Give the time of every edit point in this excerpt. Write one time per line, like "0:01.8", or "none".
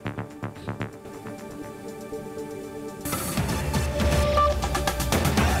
0:01.3